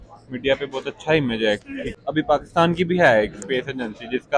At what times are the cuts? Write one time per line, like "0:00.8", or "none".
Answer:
0:01.9